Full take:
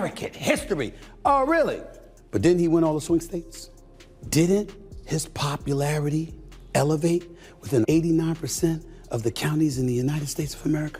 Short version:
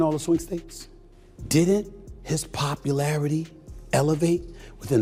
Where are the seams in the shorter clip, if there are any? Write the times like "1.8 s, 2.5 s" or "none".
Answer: none